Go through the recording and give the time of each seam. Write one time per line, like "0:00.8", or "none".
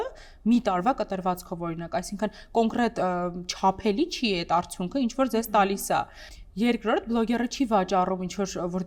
none